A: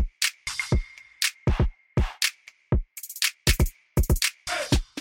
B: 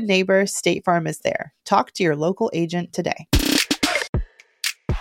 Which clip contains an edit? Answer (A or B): B